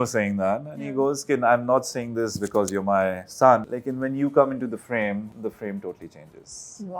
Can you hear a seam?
yes; 2 cuts; at 3.8 s, 5.3 s

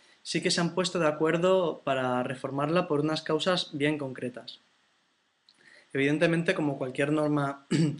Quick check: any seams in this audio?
no; 0 cuts

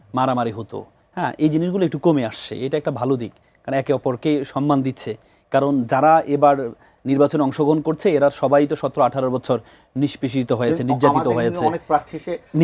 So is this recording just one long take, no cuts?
yes; 0 cuts

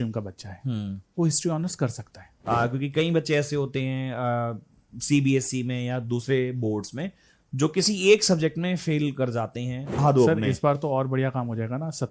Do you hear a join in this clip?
yes; 2 cuts; at 2.3 s, 10.0 s

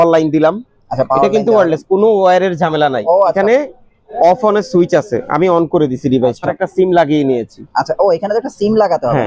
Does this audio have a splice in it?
yes; 2 cuts; at 3.3 s, 6.6 s

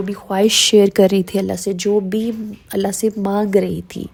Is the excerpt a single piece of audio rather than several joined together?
yes; 0 cuts

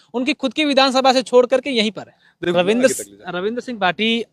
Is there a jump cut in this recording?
yes; 1 cut; at 2.4 s

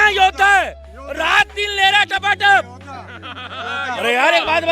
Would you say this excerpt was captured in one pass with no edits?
no; 1 cut; at 3.7 s

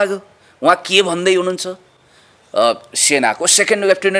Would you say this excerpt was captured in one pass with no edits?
yes; 0 cuts

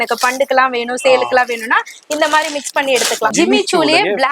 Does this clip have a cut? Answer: yes; 1 cut; at 3.3 s

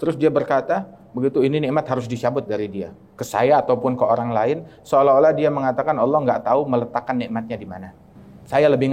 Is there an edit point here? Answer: no; 0 cuts

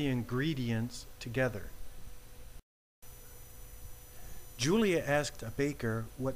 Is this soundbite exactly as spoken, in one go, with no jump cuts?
no; 1 cut; at 2.6 s

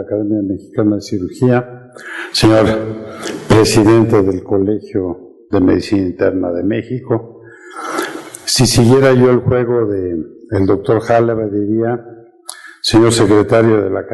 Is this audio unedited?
yes; 0 cuts

